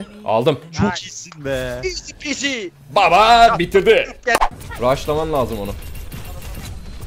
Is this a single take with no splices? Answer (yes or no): no